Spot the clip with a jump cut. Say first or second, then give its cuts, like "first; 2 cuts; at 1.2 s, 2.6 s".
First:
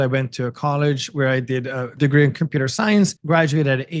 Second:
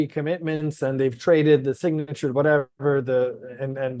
first; 2 cuts; at 1.9 s, 3.2 s